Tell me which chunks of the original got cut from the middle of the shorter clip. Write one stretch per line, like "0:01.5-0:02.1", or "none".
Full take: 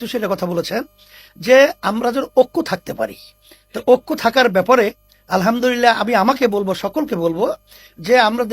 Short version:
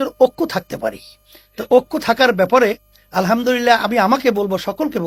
none